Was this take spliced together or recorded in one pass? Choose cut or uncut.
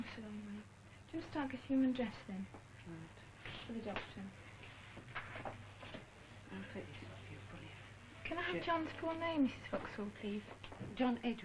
cut